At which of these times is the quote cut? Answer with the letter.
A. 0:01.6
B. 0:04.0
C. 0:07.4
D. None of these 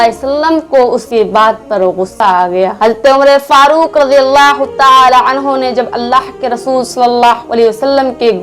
D